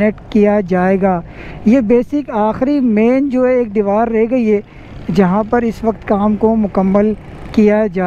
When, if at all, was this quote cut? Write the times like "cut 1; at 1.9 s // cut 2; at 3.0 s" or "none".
none